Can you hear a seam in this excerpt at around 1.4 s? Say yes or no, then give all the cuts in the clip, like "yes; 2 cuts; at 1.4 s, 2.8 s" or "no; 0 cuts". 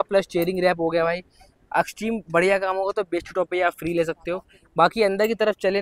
no; 0 cuts